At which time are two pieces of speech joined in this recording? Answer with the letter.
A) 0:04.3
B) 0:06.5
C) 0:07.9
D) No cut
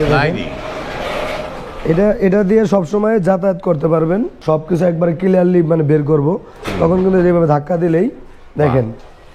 A